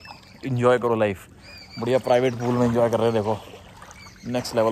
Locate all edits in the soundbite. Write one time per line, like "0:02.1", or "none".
none